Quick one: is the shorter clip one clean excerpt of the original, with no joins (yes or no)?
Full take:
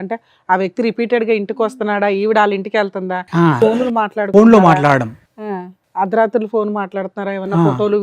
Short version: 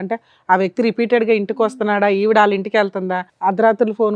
no